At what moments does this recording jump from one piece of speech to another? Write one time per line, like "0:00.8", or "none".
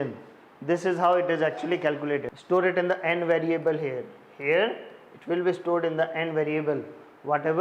0:02.3